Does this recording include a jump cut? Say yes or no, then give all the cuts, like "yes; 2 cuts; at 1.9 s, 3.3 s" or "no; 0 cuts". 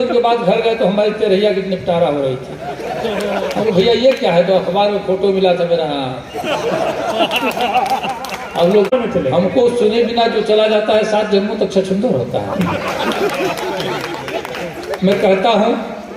yes; 1 cut; at 8.9 s